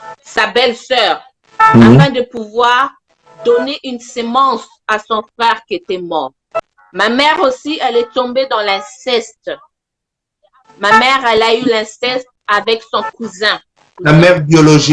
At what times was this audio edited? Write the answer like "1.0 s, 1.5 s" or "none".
6.5 s, 13.9 s

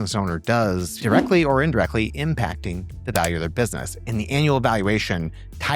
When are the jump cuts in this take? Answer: 0.9 s

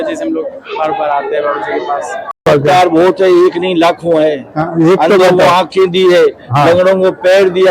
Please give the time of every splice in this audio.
2.5 s

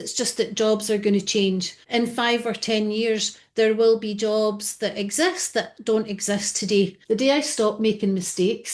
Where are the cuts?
1.7 s, 7.0 s

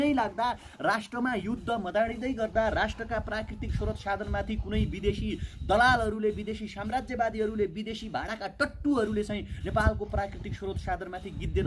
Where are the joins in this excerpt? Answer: none

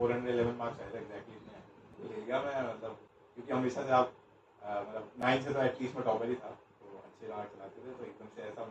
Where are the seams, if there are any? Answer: 1.9 s

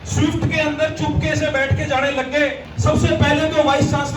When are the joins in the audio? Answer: 2.7 s

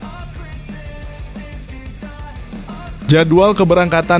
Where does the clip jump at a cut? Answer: 3.1 s

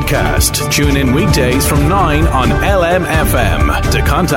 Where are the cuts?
none

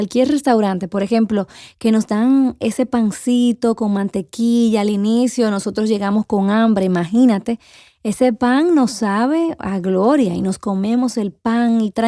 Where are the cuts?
none

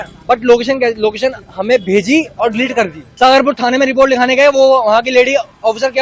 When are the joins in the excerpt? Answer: 3.0 s

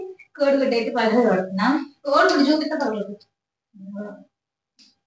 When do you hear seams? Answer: none

